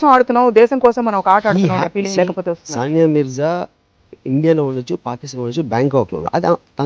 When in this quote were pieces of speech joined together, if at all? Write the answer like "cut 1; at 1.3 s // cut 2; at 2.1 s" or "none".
none

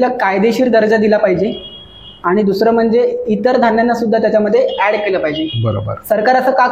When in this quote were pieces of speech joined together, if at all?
none

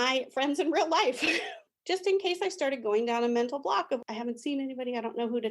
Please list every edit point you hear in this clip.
cut 1; at 1.6 s

